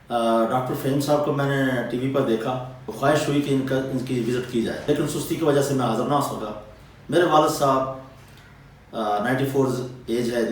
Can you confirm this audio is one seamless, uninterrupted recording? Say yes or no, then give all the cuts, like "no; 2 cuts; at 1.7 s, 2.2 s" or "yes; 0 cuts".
no; 2 cuts; at 2.9 s, 4.8 s